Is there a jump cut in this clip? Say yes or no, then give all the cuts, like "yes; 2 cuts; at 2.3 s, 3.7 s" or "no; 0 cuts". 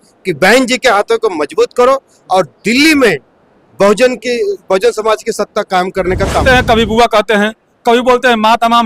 yes; 1 cut; at 6.4 s